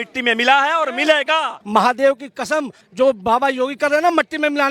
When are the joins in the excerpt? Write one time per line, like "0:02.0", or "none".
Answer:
0:01.6
0:02.8